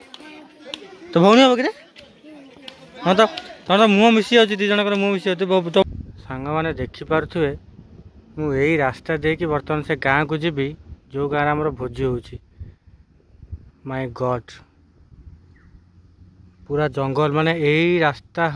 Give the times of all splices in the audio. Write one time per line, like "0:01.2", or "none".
0:05.8